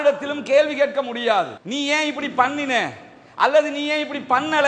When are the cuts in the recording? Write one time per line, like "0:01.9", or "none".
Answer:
none